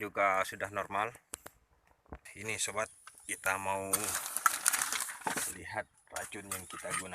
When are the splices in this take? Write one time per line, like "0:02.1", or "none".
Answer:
0:02.3